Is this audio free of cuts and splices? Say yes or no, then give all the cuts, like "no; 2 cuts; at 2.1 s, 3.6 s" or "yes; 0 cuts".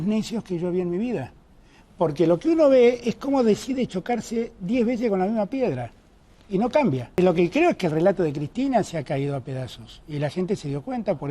no; 1 cut; at 7.2 s